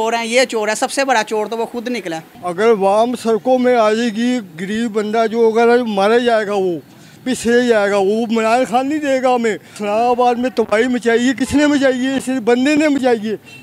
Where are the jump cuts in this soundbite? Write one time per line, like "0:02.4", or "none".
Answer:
0:02.3